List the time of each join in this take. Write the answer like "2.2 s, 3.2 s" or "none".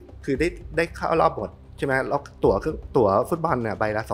none